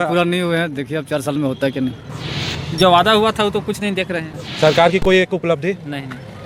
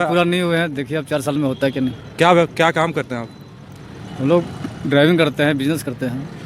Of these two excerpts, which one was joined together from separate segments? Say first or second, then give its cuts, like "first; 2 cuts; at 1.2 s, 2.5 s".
first; 2 cuts; at 2.0 s, 4.4 s